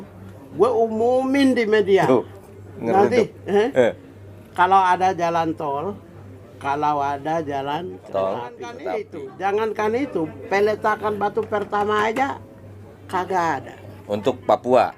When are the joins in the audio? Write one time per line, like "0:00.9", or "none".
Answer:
0:08.7